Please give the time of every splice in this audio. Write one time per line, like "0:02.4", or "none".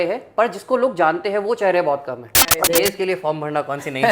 0:02.6